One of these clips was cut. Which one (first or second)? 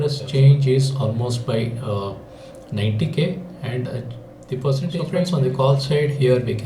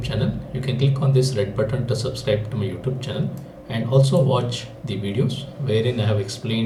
first